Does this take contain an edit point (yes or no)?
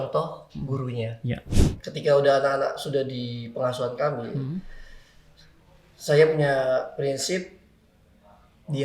yes